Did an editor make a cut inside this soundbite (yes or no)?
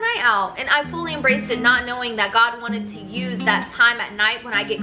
no